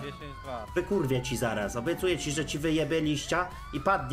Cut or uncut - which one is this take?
uncut